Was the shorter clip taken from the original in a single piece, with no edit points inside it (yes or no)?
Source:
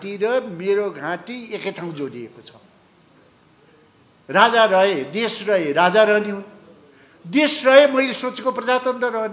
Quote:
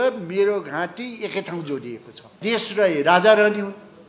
no